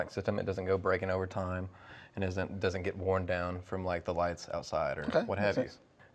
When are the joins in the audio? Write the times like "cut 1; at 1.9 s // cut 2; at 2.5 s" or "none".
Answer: cut 1; at 4.4 s